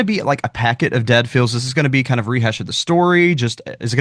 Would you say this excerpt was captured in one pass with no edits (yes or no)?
yes